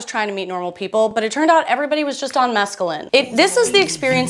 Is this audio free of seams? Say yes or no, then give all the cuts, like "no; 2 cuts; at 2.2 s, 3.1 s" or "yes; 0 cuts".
yes; 0 cuts